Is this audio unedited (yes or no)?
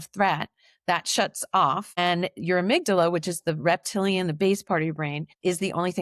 yes